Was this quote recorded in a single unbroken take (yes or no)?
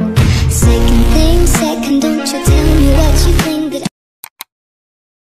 no